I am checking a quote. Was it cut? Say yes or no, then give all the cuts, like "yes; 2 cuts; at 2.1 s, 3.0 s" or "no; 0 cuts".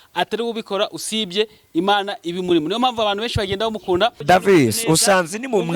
yes; 1 cut; at 4.2 s